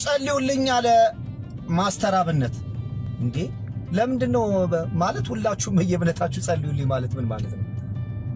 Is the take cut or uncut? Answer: uncut